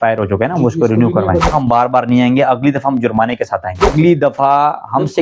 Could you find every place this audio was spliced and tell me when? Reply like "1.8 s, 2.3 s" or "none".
1.5 s, 3.9 s